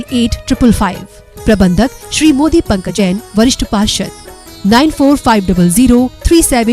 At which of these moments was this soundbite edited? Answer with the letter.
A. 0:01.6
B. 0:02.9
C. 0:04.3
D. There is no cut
B